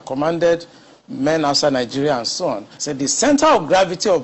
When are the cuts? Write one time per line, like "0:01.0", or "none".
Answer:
0:02.7